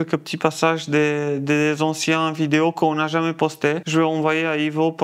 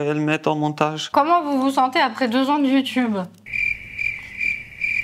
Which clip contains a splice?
second; 1 cut; at 1.0 s

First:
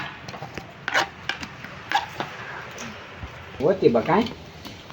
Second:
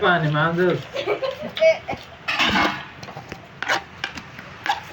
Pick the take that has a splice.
first; 1 cut; at 3.6 s

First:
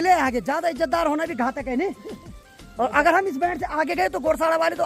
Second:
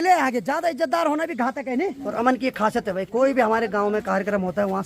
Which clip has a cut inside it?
second; 1 cut; at 2.0 s

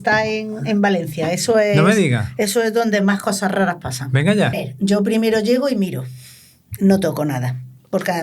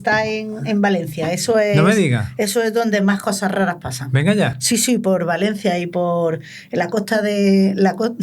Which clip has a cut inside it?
first; 1 cut; at 4.6 s

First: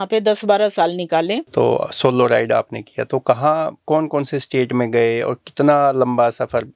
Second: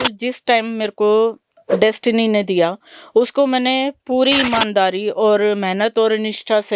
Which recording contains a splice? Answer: first; 1 cut; at 1.4 s

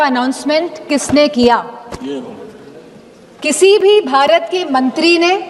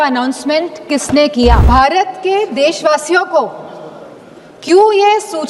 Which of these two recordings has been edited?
second; 1 cut; at 1.6 s

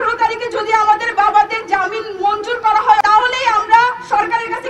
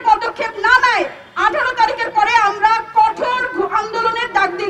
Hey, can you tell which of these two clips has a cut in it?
first; 1 cut; at 3.0 s

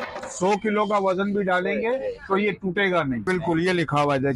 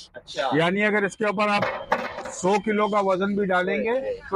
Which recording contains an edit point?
first; 1 cut; at 3.3 s

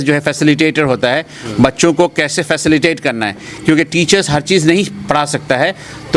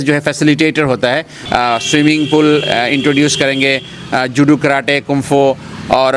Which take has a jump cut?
second; 1 cut; at 1.3 s

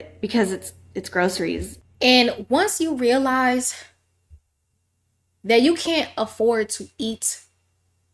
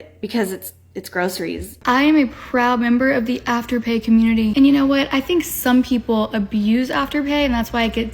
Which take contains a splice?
second; 1 cut; at 1.8 s

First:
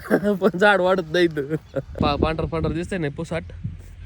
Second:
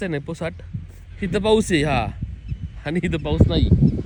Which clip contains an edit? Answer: first; 1 cut; at 2.0 s

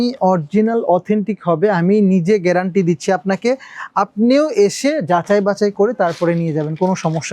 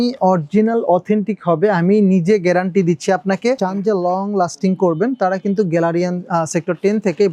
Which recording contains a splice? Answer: second; 1 cut; at 3.6 s

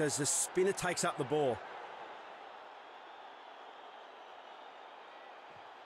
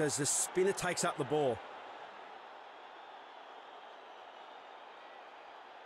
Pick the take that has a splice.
second; 1 cut; at 1.6 s

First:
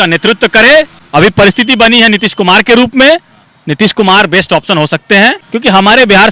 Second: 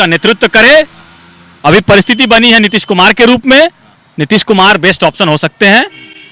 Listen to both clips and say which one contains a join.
first; 2 cuts; at 1.0 s, 5.4 s

